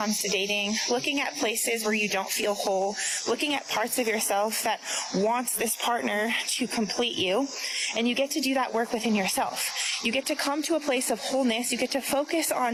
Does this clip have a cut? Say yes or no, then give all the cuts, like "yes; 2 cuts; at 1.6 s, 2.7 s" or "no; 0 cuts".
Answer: no; 0 cuts